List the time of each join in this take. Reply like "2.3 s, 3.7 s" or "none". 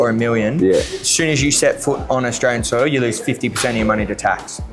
none